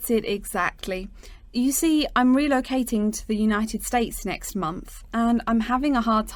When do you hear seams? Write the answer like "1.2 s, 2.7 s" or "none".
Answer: none